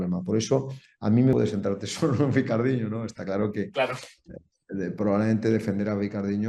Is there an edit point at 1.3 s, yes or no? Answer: yes